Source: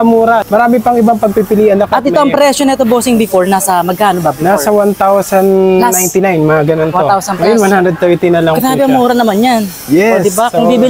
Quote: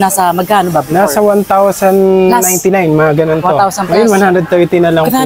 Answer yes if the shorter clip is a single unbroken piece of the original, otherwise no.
yes